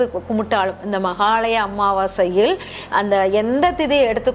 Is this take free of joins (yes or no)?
yes